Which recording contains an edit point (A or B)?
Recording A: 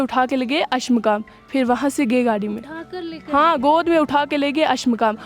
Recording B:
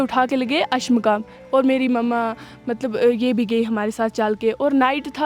B